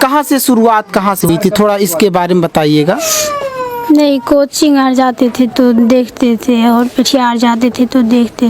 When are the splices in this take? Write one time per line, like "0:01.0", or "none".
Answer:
0:01.3